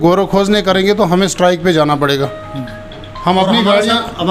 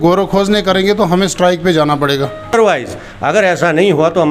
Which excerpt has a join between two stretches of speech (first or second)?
second